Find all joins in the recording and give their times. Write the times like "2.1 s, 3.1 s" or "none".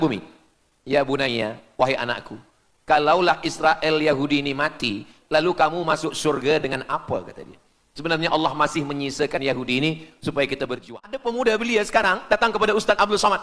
10.9 s